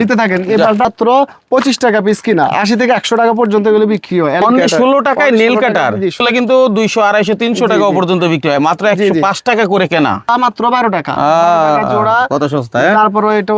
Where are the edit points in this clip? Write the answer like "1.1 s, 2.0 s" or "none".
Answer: 0.9 s, 4.4 s, 6.2 s, 10.3 s